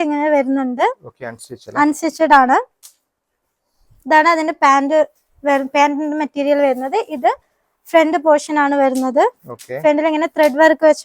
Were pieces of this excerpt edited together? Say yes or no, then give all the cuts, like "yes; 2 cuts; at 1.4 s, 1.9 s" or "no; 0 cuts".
no; 0 cuts